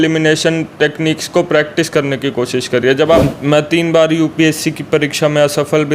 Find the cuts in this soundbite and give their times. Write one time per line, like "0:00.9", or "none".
0:03.2

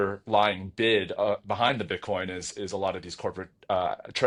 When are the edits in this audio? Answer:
none

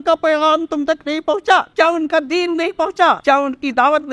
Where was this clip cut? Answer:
0:01.7
0:03.2

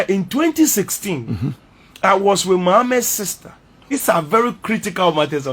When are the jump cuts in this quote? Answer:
0:03.8

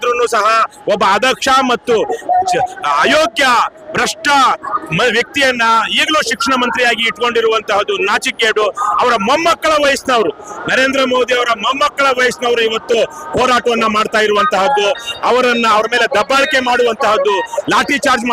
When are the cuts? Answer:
none

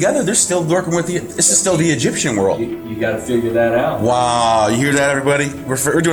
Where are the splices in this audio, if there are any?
none

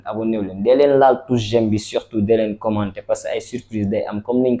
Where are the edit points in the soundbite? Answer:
none

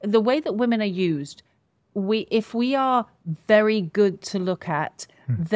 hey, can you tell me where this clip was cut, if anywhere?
none

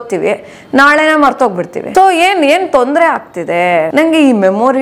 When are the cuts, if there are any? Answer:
0:01.8
0:03.9

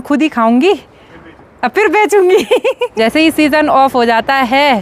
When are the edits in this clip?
0:02.9

